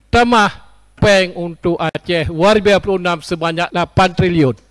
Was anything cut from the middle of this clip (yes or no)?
yes